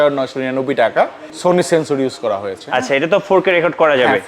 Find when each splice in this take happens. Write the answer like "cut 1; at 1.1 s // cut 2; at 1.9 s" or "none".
cut 1; at 1.3 s

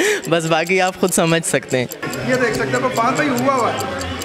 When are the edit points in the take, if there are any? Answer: cut 1; at 2.1 s

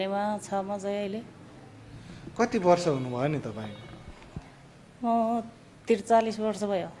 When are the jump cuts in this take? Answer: none

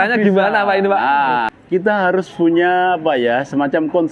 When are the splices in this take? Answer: cut 1; at 1.5 s

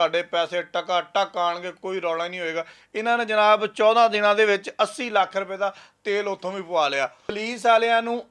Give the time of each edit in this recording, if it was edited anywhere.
cut 1; at 7.4 s

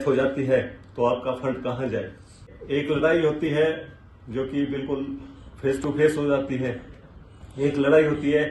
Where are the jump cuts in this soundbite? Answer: cut 1; at 2.5 s

